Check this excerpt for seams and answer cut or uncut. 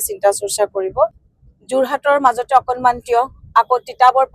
cut